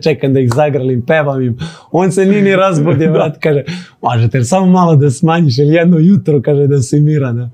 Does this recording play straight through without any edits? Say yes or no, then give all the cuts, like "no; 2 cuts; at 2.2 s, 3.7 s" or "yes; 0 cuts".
yes; 0 cuts